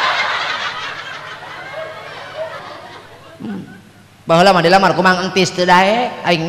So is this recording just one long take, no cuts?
no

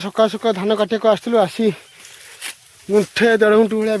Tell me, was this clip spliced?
no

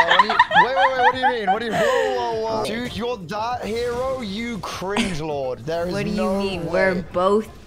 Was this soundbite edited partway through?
yes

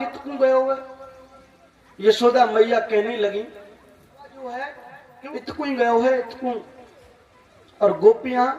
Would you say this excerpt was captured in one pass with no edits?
no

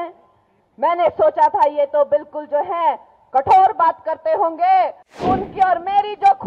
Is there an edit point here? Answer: yes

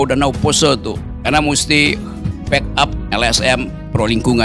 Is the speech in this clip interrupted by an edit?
yes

